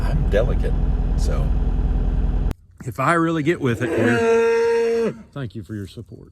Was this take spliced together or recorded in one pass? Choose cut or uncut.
cut